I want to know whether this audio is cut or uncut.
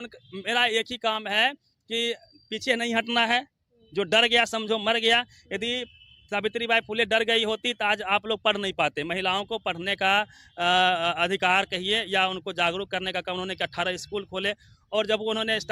uncut